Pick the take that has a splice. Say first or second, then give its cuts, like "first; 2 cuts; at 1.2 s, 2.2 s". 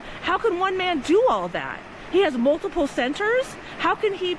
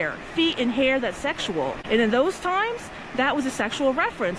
second; 1 cut; at 1.8 s